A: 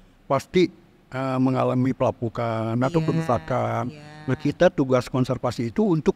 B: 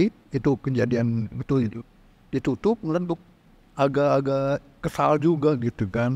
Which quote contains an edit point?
B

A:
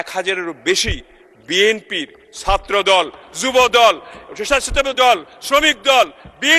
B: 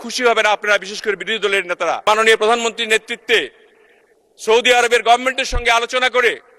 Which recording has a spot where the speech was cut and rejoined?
B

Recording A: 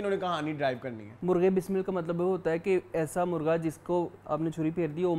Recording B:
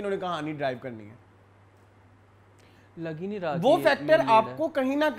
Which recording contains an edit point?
A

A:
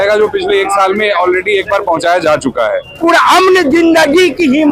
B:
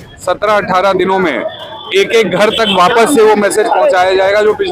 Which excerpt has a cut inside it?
A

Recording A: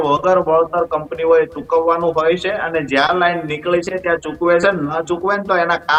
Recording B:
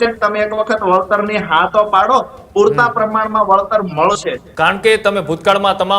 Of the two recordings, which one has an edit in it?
B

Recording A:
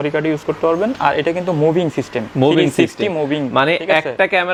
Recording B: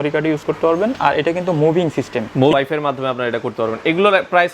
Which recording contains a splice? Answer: B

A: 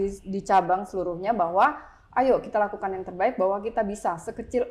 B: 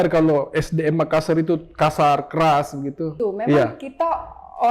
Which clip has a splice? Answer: B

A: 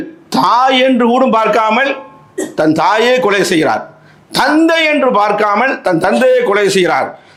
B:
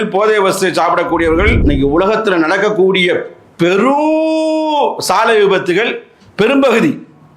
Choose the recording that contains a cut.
B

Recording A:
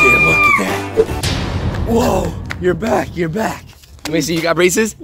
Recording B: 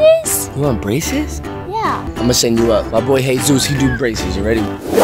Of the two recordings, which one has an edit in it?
B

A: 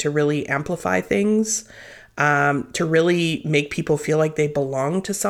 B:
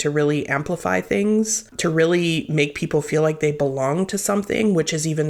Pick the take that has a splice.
B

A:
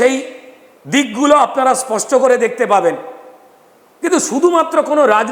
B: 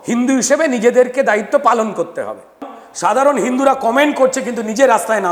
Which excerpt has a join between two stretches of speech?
B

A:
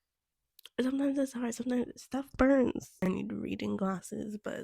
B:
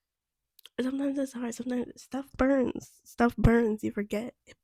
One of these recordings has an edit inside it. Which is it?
A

